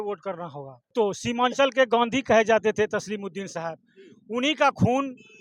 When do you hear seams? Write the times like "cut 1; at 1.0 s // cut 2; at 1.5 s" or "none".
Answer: cut 1; at 0.9 s